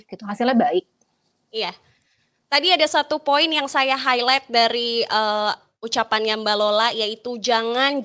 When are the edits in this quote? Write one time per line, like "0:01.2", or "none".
none